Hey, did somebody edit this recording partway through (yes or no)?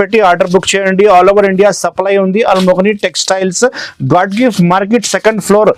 no